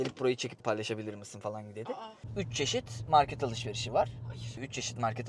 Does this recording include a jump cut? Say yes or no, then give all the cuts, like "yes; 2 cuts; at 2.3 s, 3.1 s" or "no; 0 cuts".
yes; 1 cut; at 2.3 s